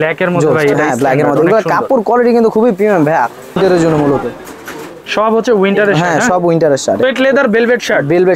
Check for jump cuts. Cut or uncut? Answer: cut